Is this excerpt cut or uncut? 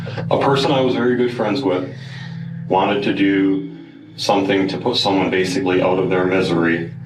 uncut